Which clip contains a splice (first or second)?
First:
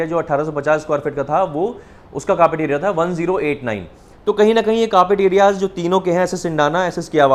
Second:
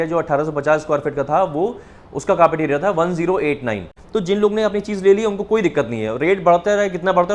second